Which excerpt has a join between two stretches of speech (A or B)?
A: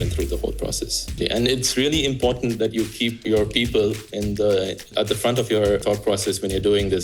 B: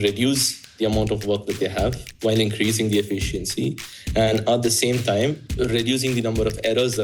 A